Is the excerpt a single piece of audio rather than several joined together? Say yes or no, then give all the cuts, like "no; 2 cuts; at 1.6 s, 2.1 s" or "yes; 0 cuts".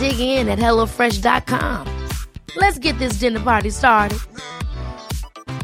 yes; 0 cuts